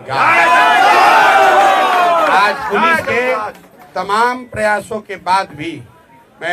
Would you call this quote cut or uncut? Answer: uncut